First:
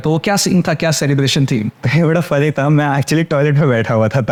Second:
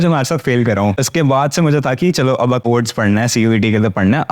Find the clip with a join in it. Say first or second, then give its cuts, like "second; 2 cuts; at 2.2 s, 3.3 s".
second; 2 cuts; at 1.0 s, 2.6 s